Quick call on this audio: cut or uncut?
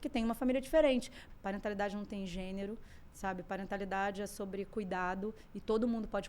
cut